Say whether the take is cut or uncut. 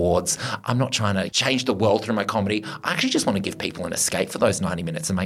cut